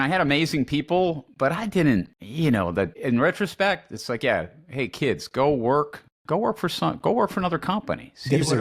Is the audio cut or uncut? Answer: cut